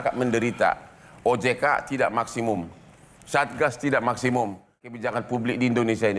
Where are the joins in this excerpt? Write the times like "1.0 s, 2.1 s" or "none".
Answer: 5.0 s